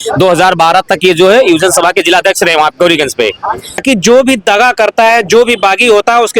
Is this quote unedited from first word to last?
no; 1 cut; at 3.8 s

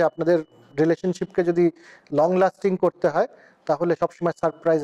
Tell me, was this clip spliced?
no; 0 cuts

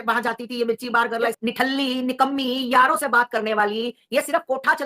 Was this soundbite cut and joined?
yes; 1 cut; at 1.4 s

